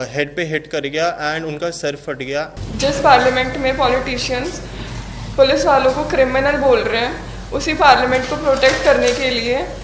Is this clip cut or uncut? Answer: cut